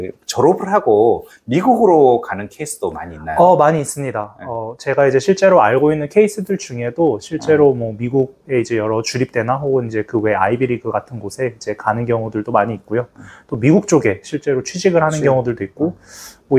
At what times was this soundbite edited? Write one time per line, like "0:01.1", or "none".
none